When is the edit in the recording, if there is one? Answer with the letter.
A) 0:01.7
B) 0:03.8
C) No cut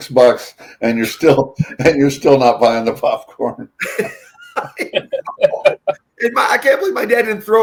C